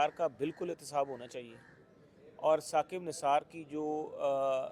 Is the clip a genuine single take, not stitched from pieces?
yes; 0 cuts

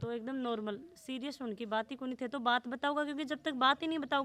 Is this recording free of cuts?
yes; 0 cuts

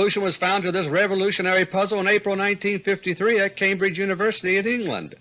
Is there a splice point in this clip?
no; 0 cuts

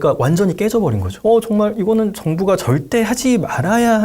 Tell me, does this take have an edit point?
yes; 1 cut; at 1.1 s

